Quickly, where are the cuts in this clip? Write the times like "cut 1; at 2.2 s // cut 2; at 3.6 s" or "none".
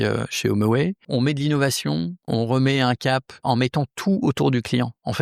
cut 1; at 1.0 s // cut 2; at 2.3 s // cut 3; at 3.4 s